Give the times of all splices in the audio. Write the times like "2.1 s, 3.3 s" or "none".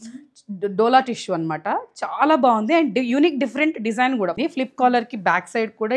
4.3 s